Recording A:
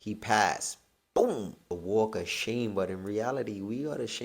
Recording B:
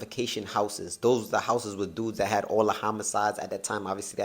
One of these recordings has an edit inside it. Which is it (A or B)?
A